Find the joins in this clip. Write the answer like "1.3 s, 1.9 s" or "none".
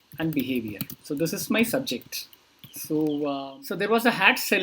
3.5 s